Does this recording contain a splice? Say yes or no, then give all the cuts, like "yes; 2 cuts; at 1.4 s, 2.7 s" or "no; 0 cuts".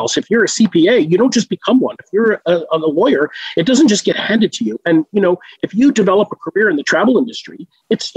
yes; 1 cut; at 6.8 s